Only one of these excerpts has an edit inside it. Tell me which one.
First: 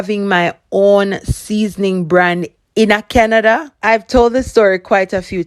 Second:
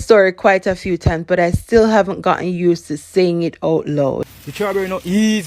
second; 1 cut; at 4.3 s

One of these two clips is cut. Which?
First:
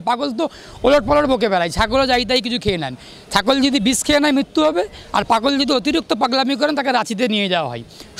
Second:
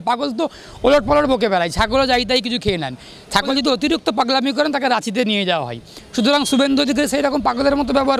second; 1 cut; at 3.5 s

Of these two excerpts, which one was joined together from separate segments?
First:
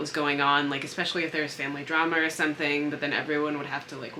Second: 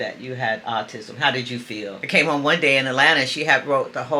second; 1 cut; at 2.1 s

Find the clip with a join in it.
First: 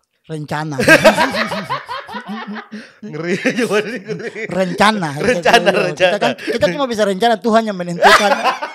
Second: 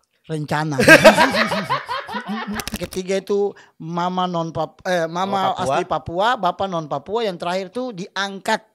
second; 1 cut; at 2.8 s

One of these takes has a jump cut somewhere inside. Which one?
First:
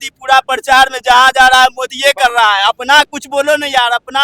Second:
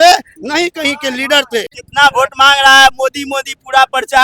second; 1 cut; at 1.8 s

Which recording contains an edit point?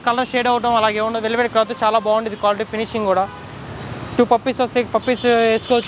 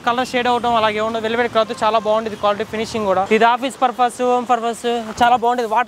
second; 1 cut; at 3.3 s

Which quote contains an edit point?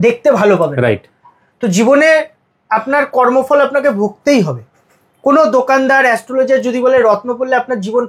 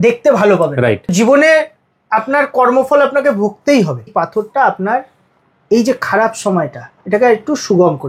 second; 2 cuts; at 1.1 s, 4.1 s

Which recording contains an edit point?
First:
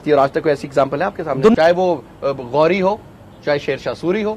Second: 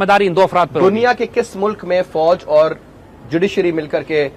first; 1 cut; at 1.5 s

